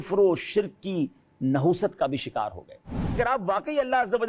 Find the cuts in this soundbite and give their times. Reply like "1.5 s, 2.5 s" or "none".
3.2 s